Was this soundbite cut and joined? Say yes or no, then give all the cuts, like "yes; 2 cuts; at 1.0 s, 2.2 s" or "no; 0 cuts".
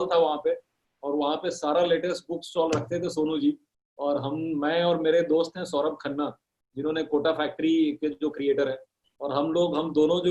no; 0 cuts